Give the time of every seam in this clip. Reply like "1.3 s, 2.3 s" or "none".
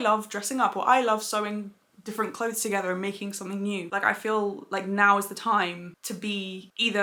none